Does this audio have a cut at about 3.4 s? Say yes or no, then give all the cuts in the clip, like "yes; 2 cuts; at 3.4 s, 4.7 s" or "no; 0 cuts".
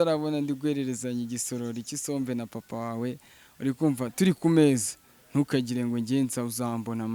no; 0 cuts